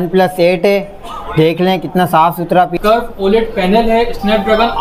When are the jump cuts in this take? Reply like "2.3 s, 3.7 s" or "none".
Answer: 2.7 s